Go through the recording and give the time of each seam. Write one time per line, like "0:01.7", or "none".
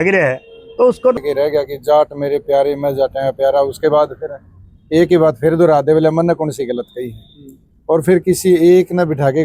0:01.2